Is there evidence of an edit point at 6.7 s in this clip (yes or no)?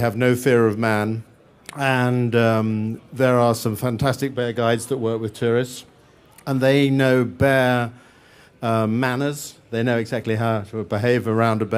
no